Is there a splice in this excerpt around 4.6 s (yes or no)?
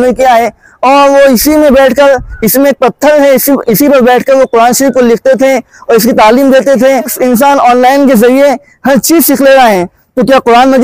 no